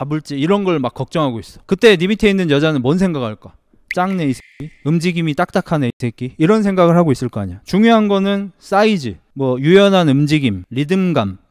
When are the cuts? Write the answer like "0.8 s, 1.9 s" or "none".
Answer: none